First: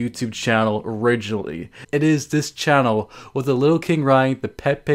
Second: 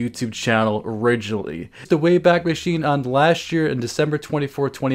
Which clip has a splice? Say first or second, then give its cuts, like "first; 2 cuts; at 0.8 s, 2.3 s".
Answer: first; 1 cut; at 1.8 s